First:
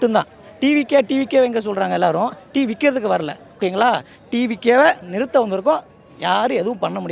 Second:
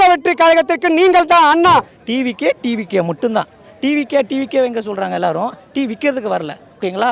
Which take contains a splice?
second; 1 cut; at 1.9 s

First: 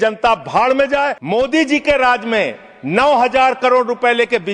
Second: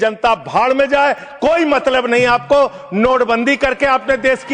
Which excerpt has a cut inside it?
first; 1 cut; at 1.2 s

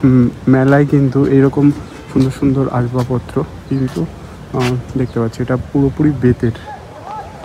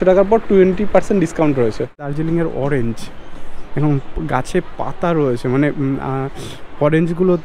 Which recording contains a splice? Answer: second; 1 cut; at 2.1 s

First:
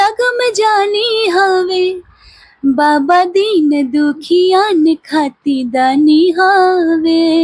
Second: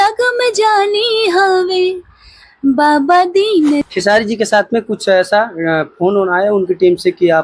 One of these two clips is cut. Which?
second; 1 cut; at 3.9 s

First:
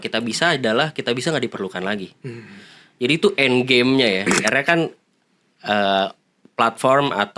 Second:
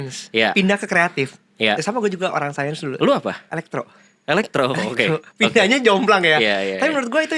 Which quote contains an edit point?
first; 1 cut; at 4.5 s

